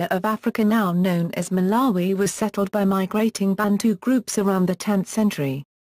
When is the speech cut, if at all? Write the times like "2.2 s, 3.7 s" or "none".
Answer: 2.0 s